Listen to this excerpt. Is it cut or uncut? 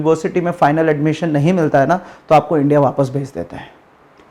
uncut